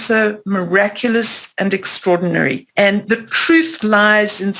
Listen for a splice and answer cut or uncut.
cut